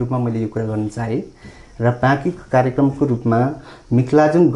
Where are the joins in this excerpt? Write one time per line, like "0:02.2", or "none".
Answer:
none